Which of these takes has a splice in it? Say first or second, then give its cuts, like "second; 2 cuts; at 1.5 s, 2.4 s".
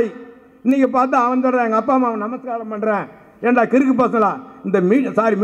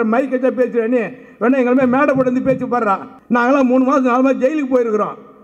second; 1 cut; at 3.1 s